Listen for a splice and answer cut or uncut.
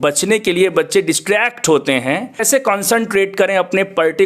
cut